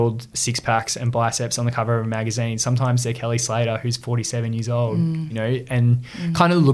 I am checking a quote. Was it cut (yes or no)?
yes